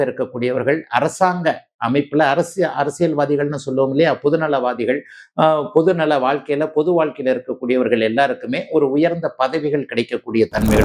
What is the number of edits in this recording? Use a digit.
0